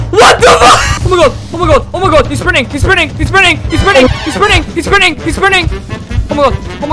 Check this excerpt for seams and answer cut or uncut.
uncut